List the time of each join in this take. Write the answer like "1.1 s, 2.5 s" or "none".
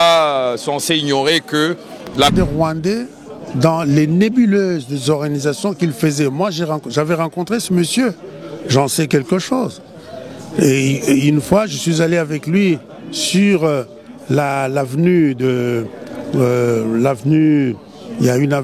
2.3 s